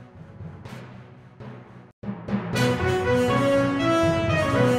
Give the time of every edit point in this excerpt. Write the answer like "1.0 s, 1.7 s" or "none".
none